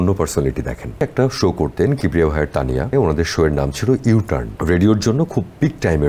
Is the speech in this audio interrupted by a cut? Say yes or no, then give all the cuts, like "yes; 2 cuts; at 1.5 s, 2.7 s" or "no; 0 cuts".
yes; 3 cuts; at 1.0 s, 2.9 s, 4.5 s